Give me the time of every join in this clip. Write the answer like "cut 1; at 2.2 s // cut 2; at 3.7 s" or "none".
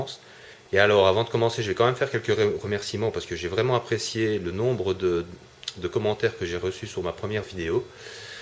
cut 1; at 6.1 s